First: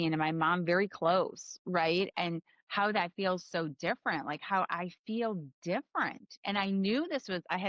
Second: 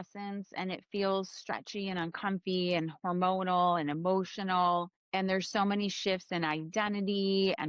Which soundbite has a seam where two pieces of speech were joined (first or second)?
second